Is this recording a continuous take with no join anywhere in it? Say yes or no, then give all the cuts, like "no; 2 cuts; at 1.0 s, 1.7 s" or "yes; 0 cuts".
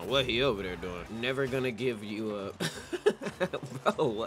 no; 2 cuts; at 1.1 s, 2.6 s